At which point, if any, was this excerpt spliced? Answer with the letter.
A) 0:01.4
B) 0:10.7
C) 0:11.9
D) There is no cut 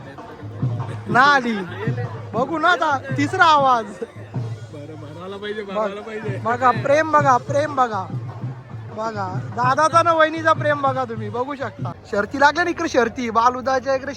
C